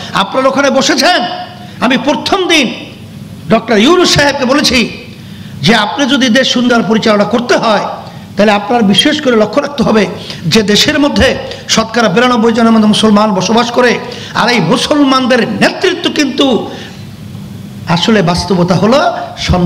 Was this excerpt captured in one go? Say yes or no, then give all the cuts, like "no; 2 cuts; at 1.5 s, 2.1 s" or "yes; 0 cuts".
yes; 0 cuts